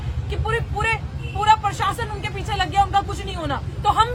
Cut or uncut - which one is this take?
uncut